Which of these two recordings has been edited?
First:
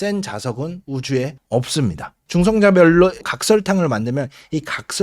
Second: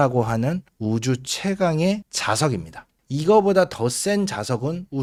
first; 1 cut; at 2.1 s

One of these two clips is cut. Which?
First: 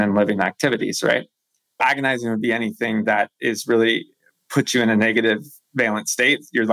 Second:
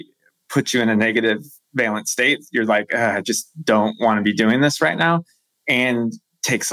first; 1 cut; at 1.8 s

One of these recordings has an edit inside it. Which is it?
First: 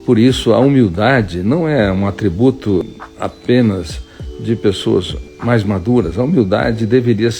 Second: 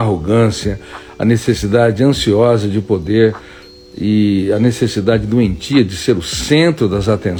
first; 2 cuts; at 2.8 s, 5.3 s

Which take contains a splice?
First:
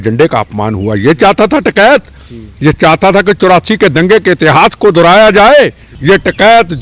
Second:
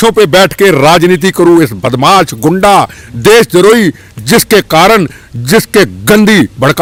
first; 1 cut; at 5.9 s

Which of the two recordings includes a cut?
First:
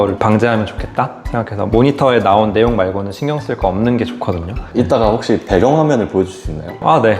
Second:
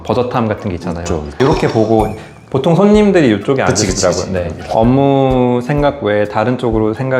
second; 2 cuts; at 1.3 s, 4.6 s

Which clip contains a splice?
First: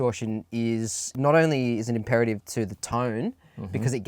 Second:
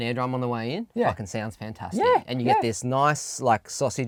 first; 1 cut; at 1.2 s

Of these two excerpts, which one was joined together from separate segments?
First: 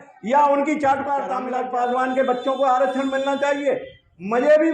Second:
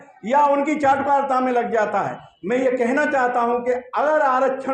first; 1 cut; at 1.4 s

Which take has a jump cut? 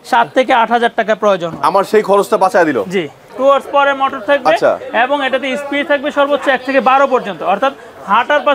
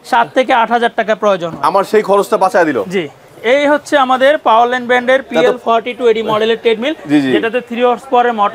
first; 1 cut; at 3.3 s

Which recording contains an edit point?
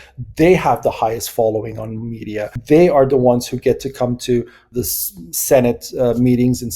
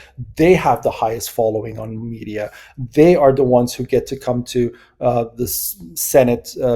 first; 2 cuts; at 2.6 s, 4.7 s

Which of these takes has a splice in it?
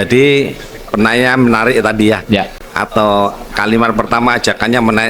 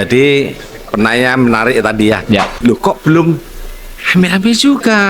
second; 1 cut; at 2.5 s

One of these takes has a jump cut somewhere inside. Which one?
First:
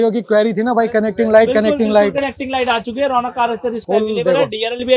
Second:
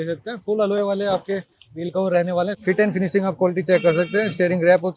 second; 1 cut; at 2.5 s

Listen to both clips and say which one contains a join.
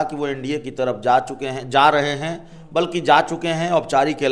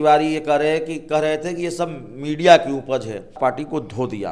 second; 1 cut; at 3.4 s

